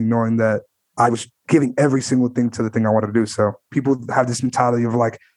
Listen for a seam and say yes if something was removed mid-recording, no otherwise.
yes